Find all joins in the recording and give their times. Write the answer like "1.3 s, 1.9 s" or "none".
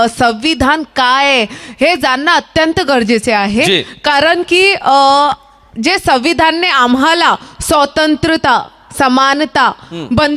none